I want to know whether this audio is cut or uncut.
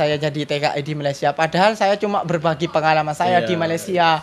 uncut